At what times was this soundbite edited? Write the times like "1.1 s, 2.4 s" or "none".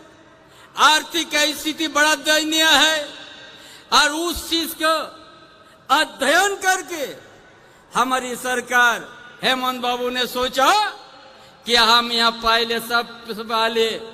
none